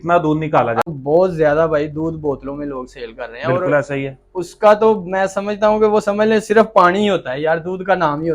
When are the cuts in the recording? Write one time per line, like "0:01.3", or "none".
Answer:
0:00.9